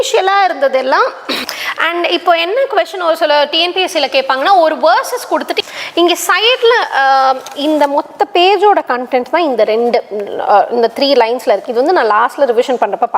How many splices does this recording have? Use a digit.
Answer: 2